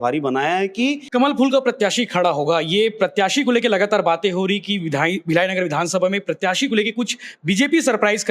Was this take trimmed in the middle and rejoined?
yes; 1 cut; at 1.0 s

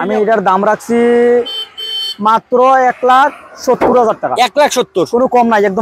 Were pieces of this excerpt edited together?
no; 0 cuts

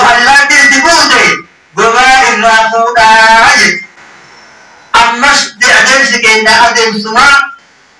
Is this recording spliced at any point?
no; 0 cuts

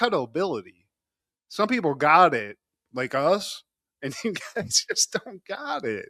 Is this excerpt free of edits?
yes; 0 cuts

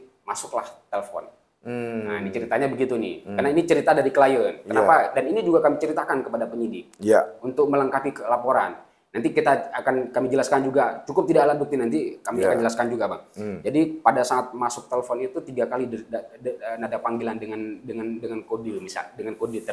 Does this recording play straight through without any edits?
yes; 0 cuts

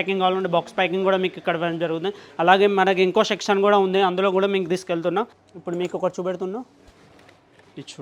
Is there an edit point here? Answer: yes; 1 cut; at 5.5 s

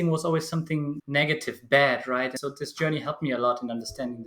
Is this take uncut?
no; 1 cut; at 2.3 s

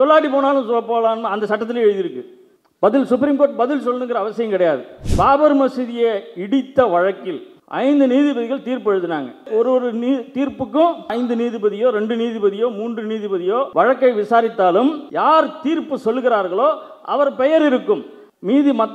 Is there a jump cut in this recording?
yes; 3 cuts; at 5.0 s, 13.7 s, 15.0 s

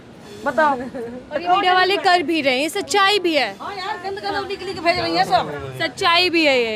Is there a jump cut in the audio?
no; 0 cuts

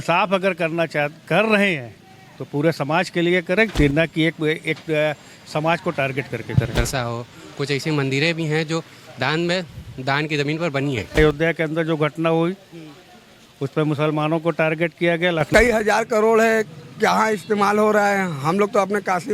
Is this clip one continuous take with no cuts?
no; 3 cuts; at 6.7 s, 11.2 s, 15.5 s

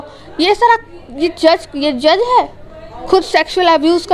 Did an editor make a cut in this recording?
no; 0 cuts

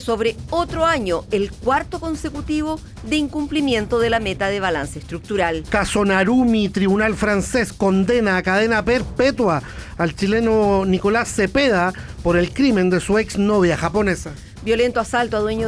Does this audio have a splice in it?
no; 0 cuts

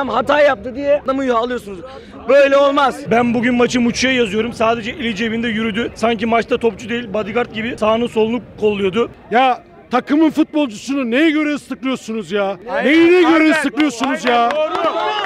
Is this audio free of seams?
no; 6 cuts; at 1.0 s, 3.0 s, 5.9 s, 7.7 s, 9.2 s, 12.6 s

